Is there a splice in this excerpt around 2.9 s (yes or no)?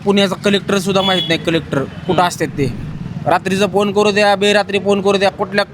yes